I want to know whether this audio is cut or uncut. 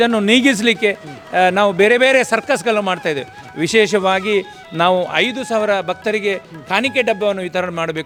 uncut